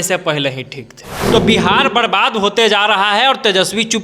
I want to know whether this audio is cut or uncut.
cut